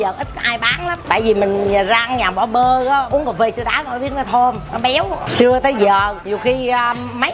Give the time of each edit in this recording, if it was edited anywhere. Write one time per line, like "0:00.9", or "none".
0:01.0
0:03.1
0:04.9
0:06.2